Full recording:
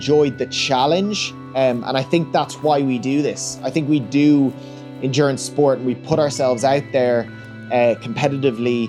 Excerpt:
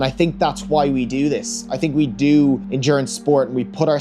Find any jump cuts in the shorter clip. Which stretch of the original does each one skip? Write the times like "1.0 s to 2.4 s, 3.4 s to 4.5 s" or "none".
4.6 s to 5.0 s